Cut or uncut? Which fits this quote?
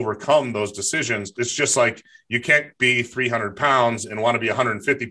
cut